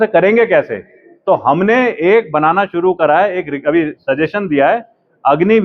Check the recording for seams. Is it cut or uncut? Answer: uncut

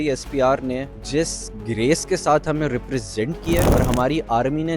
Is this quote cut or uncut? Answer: cut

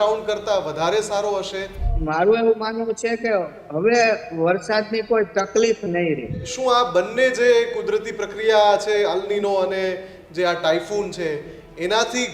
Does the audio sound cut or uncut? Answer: cut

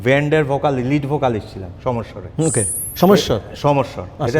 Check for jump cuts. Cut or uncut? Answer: uncut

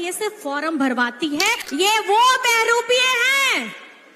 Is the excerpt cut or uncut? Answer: cut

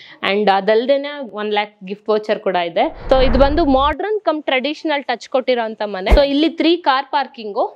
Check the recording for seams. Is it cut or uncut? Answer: cut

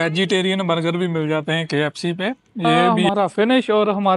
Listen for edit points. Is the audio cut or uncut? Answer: cut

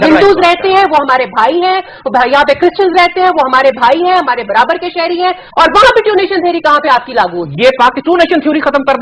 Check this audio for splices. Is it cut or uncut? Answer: uncut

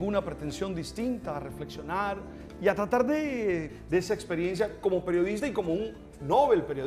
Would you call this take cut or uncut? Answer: uncut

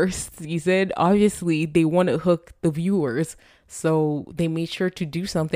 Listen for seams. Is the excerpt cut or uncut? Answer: uncut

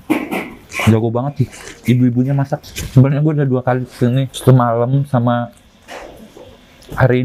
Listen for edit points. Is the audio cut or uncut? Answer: uncut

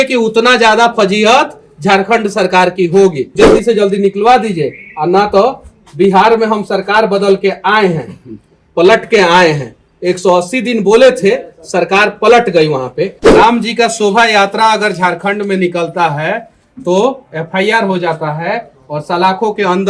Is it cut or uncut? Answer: cut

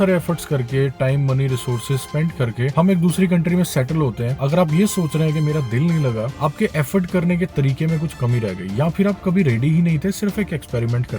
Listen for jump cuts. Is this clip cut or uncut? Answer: cut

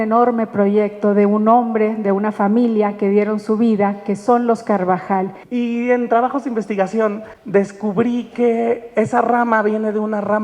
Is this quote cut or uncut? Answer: cut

